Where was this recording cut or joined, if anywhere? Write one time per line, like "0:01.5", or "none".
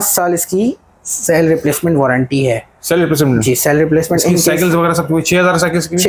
none